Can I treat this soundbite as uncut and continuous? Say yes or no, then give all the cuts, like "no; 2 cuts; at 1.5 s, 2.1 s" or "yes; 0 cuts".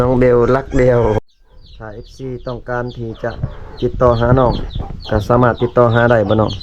no; 1 cut; at 1.2 s